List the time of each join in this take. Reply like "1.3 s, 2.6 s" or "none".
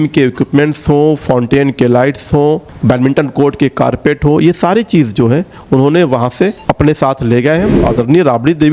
2.7 s, 6.6 s, 7.8 s